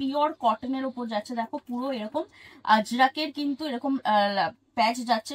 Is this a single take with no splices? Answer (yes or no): yes